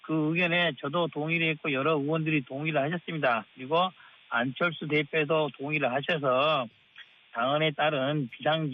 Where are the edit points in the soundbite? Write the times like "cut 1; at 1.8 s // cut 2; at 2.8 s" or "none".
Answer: cut 1; at 2.9 s